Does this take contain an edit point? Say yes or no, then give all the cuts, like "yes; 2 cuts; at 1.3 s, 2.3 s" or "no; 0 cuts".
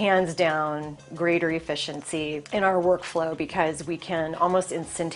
yes; 1 cut; at 2.4 s